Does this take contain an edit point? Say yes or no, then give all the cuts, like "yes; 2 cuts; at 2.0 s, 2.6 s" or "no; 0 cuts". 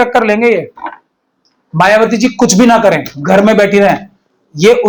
no; 0 cuts